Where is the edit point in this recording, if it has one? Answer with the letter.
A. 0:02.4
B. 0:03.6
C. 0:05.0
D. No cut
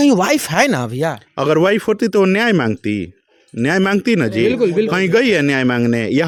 D